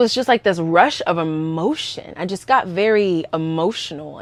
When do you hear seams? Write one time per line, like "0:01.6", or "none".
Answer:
none